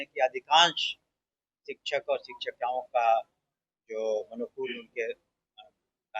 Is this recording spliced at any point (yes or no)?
no